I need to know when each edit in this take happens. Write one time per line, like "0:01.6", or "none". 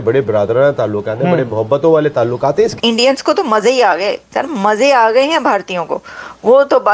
0:02.7